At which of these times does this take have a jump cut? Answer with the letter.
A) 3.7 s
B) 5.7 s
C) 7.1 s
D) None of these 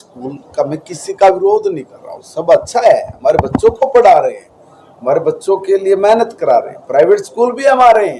C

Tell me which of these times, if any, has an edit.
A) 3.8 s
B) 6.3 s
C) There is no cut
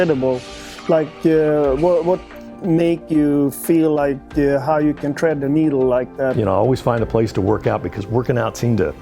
B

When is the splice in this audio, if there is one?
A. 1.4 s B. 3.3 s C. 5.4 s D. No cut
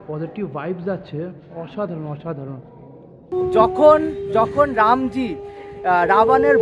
B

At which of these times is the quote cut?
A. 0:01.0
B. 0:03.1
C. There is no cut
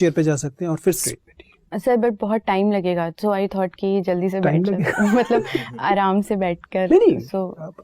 A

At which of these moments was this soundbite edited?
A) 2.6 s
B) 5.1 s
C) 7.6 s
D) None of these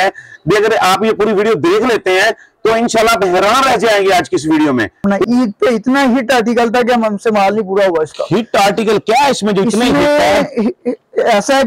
B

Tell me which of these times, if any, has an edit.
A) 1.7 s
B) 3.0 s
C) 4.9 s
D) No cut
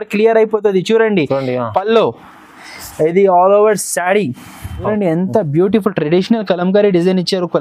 C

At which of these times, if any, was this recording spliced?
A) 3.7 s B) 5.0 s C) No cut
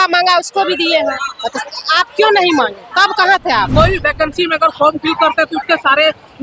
A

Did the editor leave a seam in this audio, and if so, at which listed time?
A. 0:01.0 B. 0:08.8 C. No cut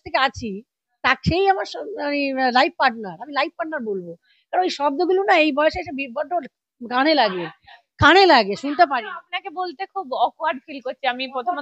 C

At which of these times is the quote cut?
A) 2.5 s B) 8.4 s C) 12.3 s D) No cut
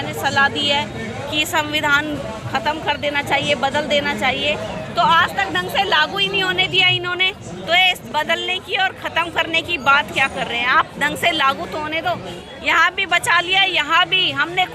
C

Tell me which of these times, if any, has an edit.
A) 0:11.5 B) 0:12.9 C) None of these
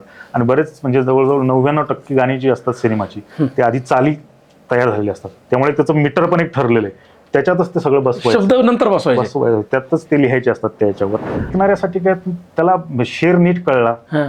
A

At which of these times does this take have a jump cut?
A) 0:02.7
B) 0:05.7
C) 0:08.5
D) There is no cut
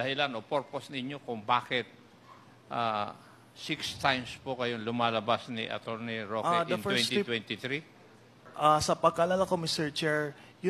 C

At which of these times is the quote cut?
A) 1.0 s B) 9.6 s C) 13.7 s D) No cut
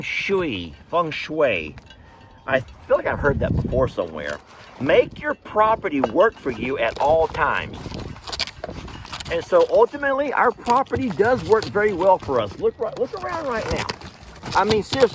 D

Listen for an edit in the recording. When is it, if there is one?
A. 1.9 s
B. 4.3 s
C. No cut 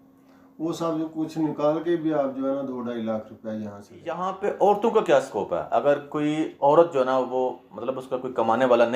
B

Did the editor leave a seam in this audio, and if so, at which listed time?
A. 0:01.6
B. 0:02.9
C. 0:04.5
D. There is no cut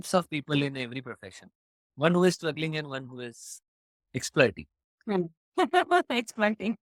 D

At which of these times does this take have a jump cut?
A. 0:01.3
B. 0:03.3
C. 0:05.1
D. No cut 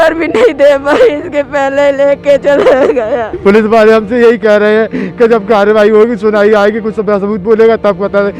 B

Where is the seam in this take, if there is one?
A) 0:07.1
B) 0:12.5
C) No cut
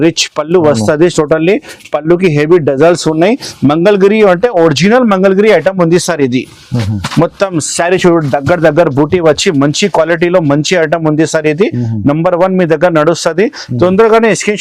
C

